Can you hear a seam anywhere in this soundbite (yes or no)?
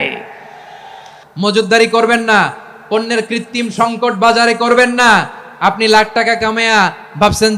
yes